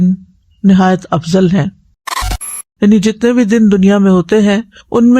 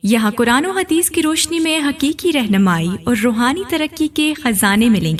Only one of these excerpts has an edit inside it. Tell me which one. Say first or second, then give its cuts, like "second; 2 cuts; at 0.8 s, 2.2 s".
first; 1 cut; at 2.4 s